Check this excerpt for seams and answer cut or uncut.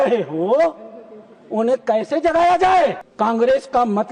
cut